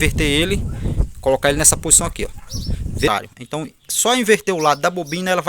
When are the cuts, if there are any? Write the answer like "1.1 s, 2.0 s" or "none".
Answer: 3.1 s